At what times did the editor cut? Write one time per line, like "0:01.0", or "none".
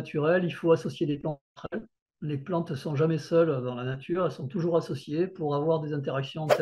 none